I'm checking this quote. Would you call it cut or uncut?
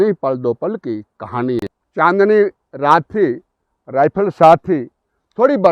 cut